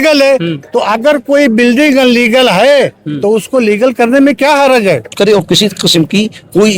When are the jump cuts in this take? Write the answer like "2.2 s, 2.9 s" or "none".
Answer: 5.1 s

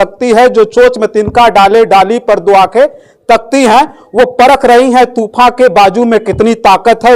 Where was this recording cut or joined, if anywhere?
none

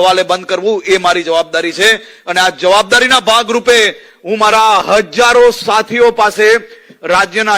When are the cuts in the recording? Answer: none

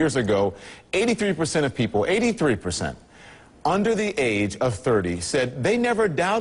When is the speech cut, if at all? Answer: 1.3 s

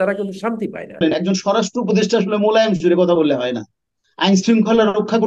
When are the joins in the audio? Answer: 1.0 s

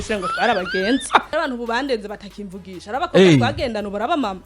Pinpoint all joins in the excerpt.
1.3 s

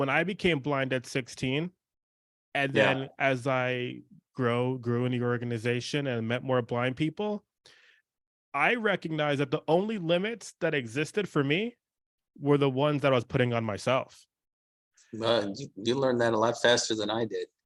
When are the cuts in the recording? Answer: none

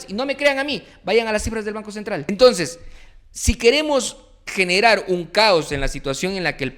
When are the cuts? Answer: 2.2 s

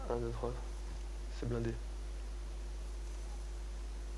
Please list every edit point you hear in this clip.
none

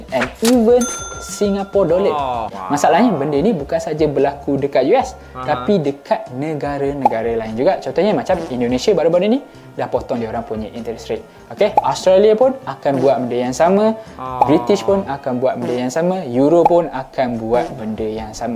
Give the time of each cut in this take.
2.5 s

